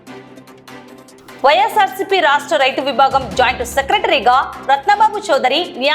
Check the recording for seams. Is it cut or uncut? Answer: uncut